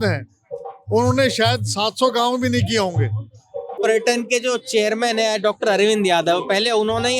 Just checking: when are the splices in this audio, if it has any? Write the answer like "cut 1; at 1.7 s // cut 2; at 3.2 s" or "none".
cut 1; at 3.8 s